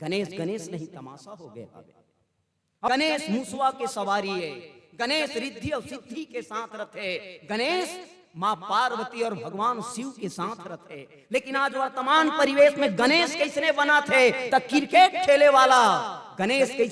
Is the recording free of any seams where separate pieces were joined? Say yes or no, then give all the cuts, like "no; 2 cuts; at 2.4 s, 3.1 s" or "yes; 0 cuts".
no; 1 cut; at 2.9 s